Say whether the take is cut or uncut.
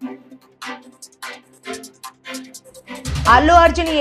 uncut